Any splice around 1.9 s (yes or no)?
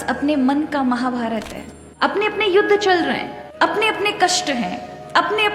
yes